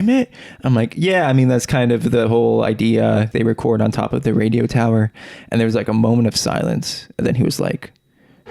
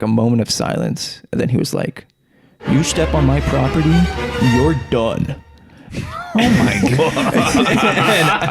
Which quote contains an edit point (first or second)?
first